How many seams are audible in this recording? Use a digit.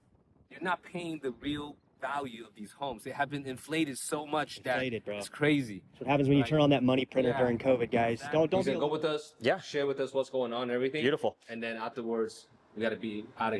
1